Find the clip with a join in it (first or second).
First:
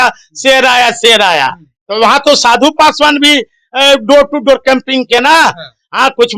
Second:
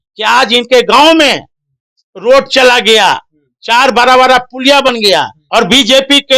second